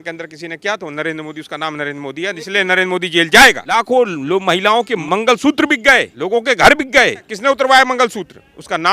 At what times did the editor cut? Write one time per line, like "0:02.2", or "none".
0:03.6
0:05.0
0:06.1
0:07.3